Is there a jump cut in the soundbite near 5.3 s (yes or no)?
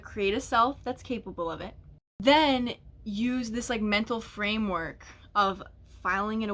no